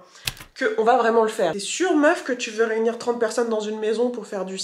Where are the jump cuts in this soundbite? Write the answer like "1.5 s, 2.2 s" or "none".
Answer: 1.6 s